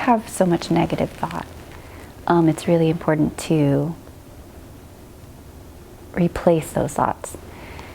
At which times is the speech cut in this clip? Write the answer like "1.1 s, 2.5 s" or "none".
none